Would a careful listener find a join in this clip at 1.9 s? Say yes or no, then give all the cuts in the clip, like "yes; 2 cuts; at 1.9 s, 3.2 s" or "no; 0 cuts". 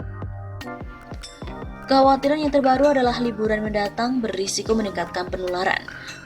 yes; 1 cut; at 1.9 s